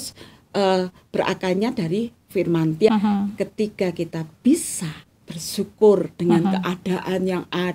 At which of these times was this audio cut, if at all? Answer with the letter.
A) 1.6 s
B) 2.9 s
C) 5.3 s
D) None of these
B